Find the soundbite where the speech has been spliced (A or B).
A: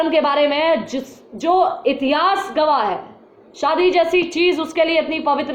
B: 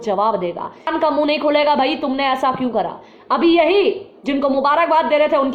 B